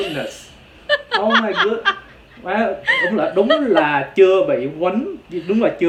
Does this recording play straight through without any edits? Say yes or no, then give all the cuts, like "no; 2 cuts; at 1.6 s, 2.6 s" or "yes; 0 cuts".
yes; 0 cuts